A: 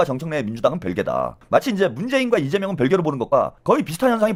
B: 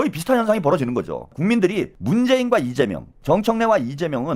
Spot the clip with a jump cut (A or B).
B